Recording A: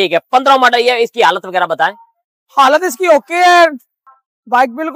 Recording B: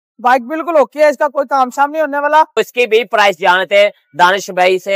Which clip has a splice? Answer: B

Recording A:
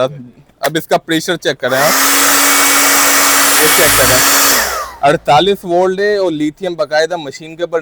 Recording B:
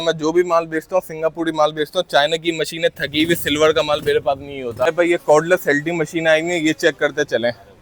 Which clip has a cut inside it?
B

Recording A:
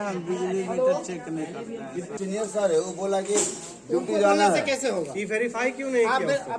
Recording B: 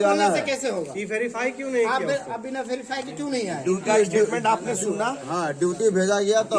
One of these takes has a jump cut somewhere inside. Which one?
A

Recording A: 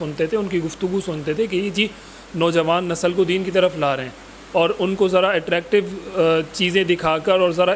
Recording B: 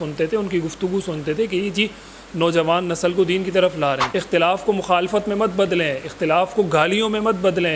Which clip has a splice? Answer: B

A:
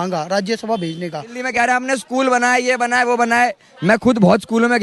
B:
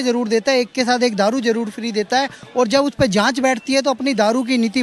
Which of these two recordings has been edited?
A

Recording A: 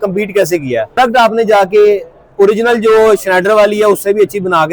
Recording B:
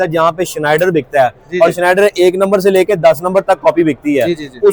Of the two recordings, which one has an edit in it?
A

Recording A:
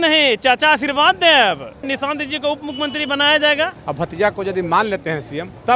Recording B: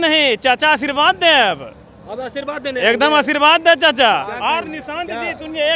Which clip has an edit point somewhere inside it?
A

